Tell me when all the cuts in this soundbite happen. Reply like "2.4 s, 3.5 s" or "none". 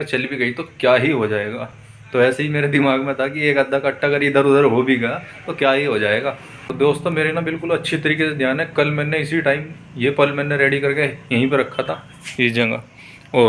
6.7 s